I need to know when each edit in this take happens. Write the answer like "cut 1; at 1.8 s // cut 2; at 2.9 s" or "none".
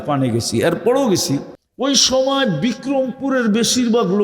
cut 1; at 1.6 s